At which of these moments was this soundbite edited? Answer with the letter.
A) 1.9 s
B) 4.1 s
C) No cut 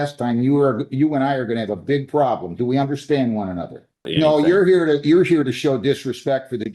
B